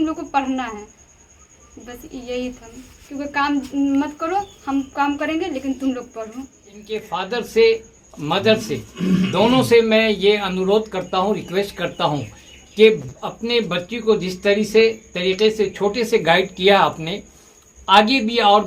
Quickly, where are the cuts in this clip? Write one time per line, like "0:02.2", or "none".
0:07.1